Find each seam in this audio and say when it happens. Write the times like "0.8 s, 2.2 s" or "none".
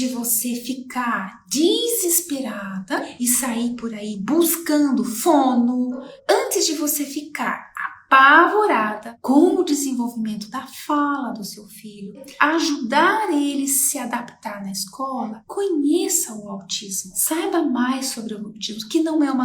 3.1 s, 6.1 s, 12.3 s